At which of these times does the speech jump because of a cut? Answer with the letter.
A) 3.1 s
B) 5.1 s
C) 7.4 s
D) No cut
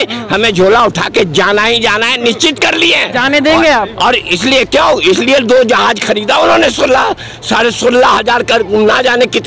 D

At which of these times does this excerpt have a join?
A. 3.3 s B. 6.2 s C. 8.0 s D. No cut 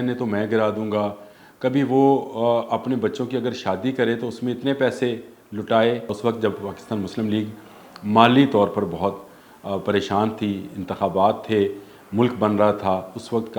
B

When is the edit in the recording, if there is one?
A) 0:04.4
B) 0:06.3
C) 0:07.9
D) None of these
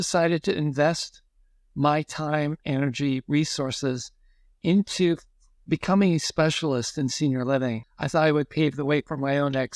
C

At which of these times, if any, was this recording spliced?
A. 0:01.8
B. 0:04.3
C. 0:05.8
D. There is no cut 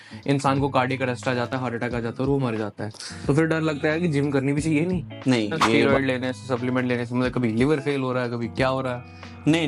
C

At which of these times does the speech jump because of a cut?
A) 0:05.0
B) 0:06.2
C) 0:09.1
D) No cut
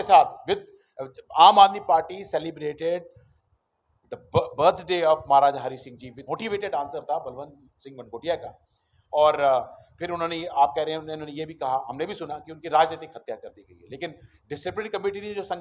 B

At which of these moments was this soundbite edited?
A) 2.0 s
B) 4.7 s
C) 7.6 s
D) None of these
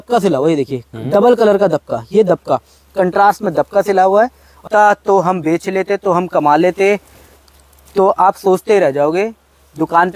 B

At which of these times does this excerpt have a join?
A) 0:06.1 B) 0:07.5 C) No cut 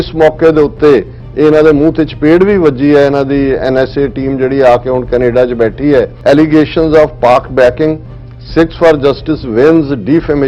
A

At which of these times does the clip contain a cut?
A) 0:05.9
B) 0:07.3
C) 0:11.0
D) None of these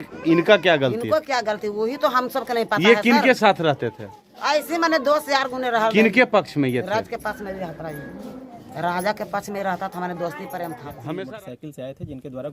C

